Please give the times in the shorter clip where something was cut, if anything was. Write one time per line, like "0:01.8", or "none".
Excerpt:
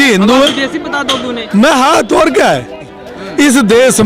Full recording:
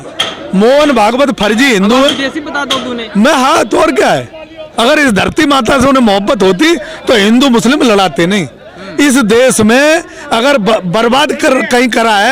0:03.0